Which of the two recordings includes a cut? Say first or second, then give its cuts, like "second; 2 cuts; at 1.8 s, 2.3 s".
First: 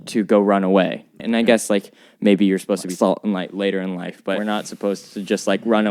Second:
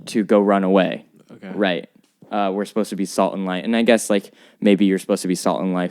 first; 3 cuts; at 1.2 s, 2.9 s, 4.4 s